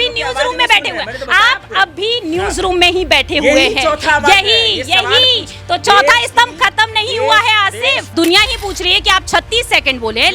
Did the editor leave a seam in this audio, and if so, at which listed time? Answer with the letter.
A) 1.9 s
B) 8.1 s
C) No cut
B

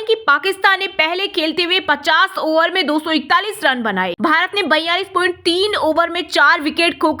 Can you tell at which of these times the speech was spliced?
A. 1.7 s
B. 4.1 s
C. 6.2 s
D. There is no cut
B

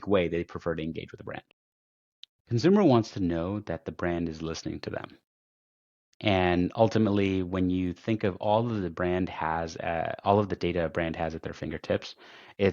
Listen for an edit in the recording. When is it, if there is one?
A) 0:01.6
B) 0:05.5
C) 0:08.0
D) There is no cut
A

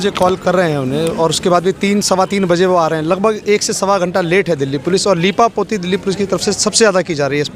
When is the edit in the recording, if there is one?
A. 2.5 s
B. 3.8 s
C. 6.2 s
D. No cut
D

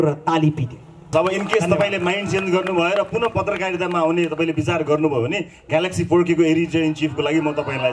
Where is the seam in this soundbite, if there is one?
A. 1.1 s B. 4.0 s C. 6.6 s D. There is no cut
A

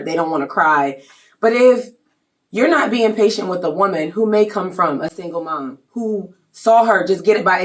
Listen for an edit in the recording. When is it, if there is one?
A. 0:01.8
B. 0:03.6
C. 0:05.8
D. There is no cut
D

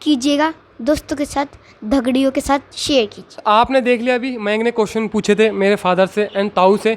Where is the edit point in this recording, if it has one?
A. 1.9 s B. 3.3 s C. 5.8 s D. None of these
D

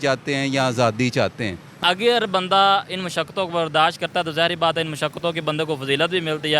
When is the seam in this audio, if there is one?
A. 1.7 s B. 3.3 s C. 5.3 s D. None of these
A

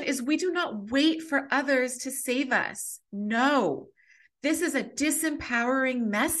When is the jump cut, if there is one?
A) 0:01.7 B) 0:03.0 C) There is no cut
C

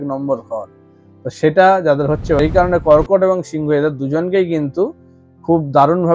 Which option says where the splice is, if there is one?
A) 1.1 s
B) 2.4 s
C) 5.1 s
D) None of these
B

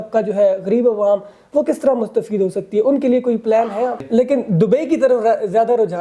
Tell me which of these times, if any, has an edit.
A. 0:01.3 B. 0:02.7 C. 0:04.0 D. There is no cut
C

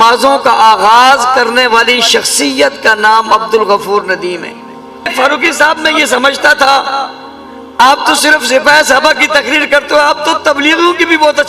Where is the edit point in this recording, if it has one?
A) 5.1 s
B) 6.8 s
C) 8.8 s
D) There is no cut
A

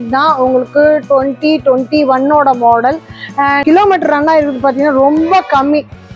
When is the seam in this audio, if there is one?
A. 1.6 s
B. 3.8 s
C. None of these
B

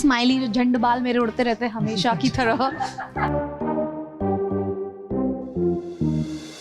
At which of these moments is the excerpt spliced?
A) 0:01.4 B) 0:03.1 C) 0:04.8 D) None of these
B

